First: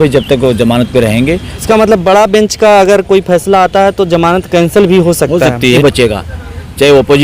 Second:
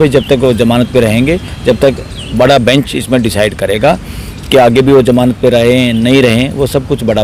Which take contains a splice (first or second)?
first